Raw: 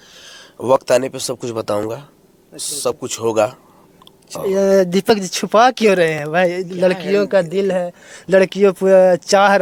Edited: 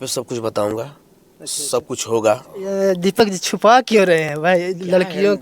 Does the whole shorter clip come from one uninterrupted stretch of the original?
no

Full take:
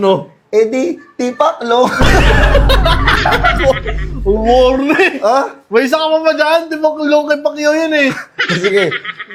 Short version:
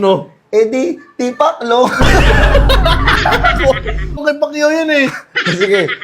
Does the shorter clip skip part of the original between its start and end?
yes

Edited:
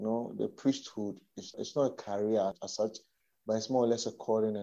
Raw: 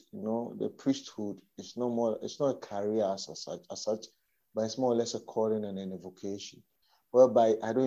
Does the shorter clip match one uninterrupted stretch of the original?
no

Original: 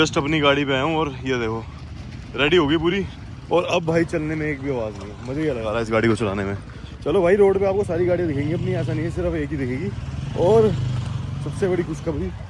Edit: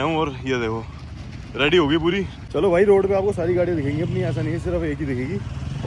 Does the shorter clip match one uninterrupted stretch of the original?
no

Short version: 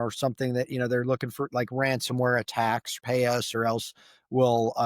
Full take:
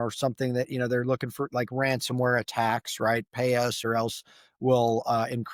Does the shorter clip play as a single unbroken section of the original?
no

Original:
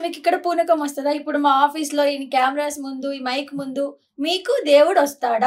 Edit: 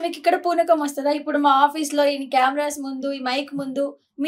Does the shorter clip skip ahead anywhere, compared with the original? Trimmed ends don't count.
no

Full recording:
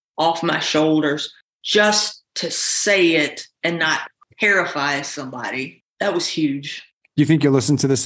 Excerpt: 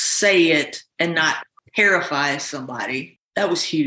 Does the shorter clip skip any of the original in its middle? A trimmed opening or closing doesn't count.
no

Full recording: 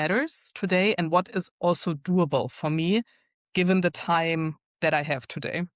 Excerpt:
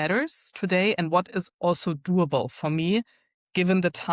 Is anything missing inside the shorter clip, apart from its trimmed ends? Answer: no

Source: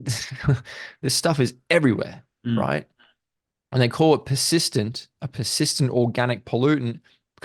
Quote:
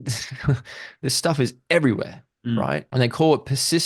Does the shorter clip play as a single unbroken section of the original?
no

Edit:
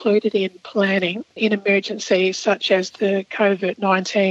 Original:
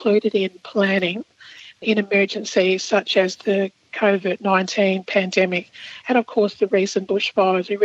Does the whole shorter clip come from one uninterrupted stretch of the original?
no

